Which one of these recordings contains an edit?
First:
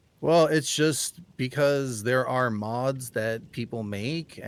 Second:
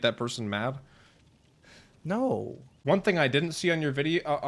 second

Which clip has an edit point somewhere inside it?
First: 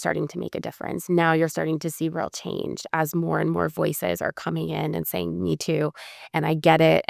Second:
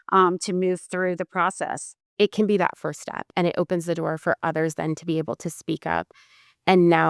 second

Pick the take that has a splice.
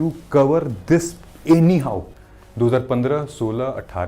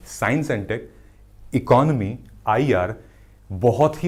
first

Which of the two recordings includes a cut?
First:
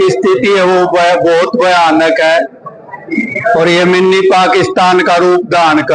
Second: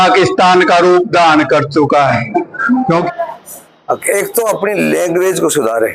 second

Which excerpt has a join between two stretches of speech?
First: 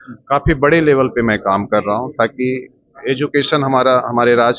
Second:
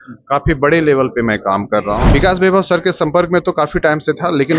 second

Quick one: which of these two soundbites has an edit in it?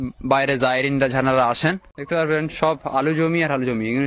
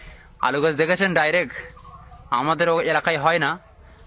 first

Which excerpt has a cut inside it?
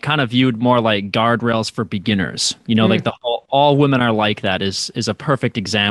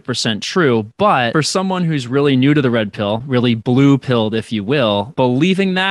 second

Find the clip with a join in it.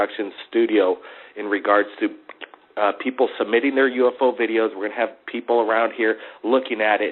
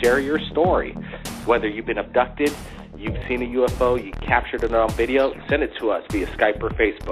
first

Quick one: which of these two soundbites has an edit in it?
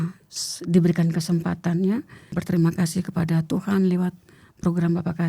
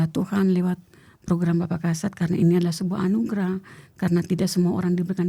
first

